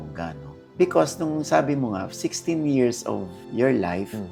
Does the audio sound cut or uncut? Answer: uncut